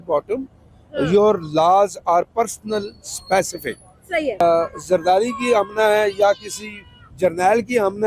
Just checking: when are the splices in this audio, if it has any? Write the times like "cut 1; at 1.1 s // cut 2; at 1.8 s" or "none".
cut 1; at 4.4 s